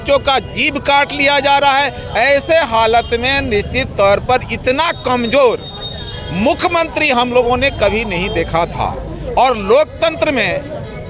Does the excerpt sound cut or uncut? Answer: uncut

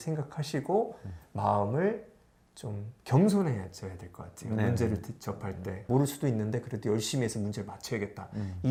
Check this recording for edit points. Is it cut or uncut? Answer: uncut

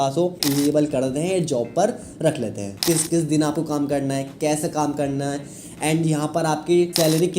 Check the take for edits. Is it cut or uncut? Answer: cut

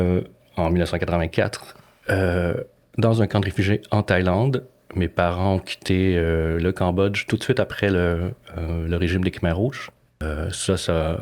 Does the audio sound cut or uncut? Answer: cut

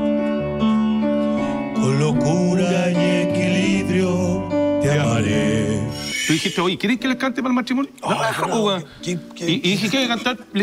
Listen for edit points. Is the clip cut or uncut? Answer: cut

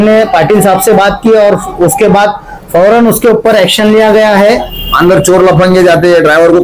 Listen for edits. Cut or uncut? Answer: cut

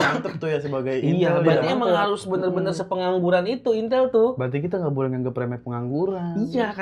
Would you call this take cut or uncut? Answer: uncut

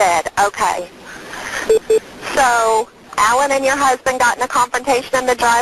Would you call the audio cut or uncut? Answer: uncut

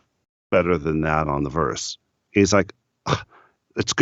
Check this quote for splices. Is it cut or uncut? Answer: uncut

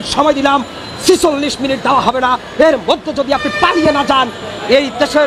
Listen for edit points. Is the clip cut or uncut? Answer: uncut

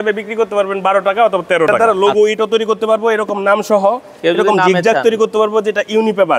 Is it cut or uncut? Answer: cut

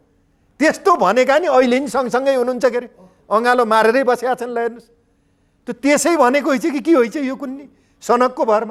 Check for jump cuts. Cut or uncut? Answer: uncut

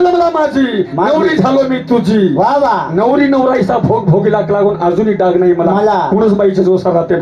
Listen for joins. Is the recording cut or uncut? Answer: uncut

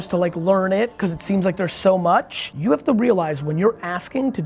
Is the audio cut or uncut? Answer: cut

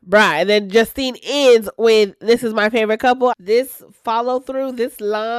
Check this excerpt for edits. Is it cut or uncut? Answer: cut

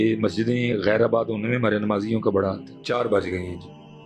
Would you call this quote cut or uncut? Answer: cut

